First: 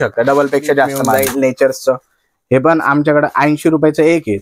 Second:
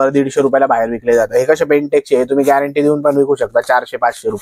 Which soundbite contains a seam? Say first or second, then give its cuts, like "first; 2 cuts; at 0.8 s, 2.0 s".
first; 1 cut; at 1.1 s